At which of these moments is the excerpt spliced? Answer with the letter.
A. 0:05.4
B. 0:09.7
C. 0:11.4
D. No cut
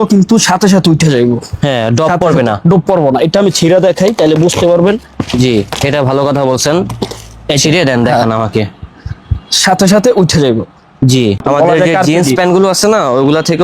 C